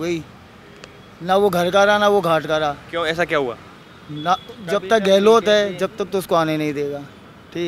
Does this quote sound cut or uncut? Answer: uncut